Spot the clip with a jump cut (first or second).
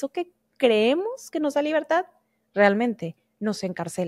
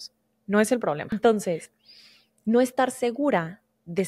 second